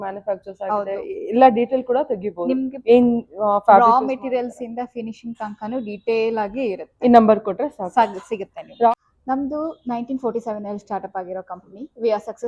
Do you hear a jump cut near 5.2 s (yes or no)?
no